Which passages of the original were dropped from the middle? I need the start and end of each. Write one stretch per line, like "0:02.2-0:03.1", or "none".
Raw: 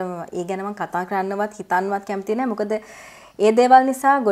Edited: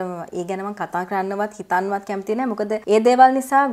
0:02.8-0:03.3